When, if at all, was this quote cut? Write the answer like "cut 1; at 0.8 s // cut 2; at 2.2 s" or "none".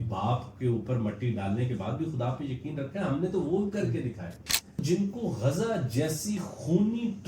cut 1; at 4.8 s